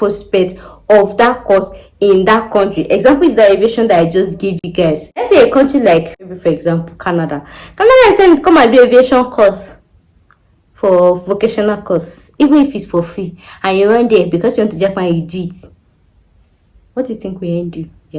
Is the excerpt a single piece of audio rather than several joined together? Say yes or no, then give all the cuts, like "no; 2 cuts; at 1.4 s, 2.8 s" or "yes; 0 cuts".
no; 2 cuts; at 5.3 s, 6.3 s